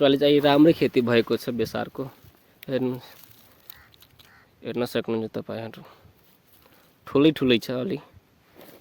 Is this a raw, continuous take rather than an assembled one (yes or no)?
yes